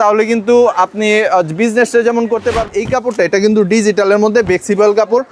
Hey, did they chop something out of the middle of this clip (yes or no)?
yes